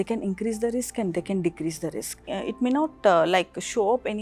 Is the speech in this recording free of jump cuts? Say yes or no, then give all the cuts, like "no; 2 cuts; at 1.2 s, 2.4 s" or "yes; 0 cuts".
no; 1 cut; at 2.3 s